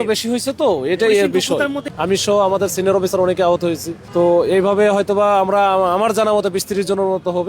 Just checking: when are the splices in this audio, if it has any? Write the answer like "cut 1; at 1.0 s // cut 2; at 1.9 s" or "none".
cut 1; at 1.8 s // cut 2; at 3.9 s